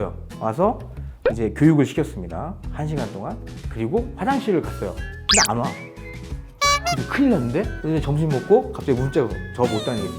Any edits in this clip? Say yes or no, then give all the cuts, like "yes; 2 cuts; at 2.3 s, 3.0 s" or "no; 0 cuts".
yes; 1 cut; at 7.8 s